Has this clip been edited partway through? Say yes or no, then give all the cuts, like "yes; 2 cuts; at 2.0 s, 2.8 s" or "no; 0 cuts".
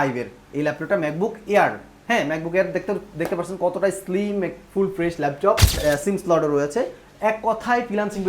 yes; 1 cut; at 5.8 s